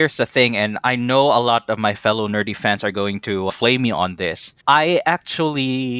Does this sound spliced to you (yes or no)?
yes